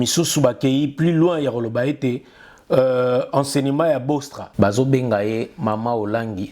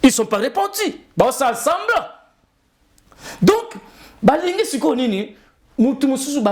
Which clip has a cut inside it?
first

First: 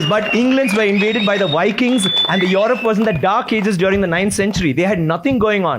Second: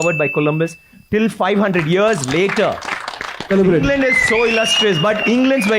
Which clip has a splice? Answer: second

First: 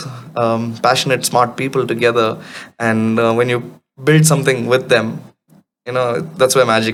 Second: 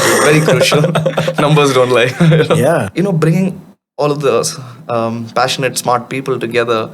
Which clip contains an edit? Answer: second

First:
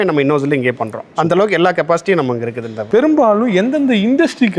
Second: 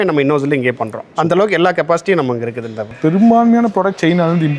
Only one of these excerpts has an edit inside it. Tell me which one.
first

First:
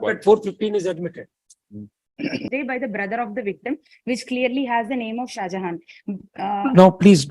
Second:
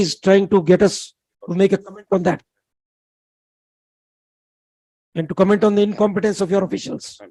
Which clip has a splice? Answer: first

